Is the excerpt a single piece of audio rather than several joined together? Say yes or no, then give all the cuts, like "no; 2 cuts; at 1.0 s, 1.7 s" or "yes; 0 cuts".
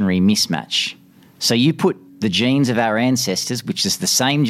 no; 1 cut; at 2.1 s